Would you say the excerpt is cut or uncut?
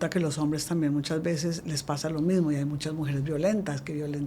uncut